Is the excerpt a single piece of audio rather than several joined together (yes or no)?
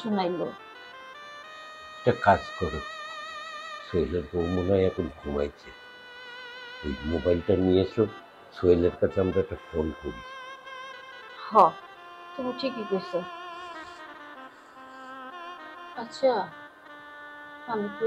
yes